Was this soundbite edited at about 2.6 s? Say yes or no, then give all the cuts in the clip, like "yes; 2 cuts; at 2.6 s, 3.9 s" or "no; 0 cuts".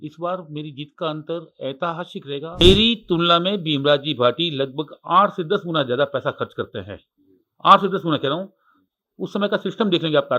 yes; 1 cut; at 2.6 s